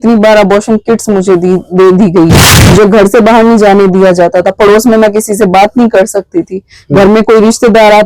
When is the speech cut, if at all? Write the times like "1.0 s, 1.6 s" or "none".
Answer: 2.3 s